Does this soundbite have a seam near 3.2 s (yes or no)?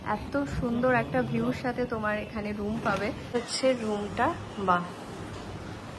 yes